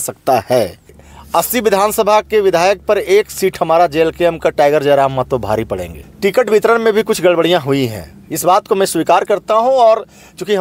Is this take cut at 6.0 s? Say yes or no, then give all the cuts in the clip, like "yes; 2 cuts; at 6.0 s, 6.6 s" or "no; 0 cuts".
yes; 2 cuts; at 1.0 s, 6.0 s